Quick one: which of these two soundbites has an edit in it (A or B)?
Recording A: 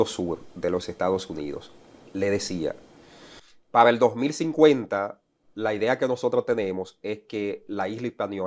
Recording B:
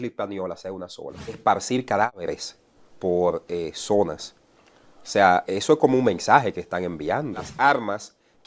B